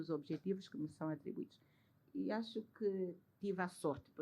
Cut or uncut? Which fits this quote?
uncut